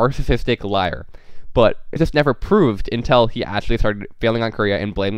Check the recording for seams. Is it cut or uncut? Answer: cut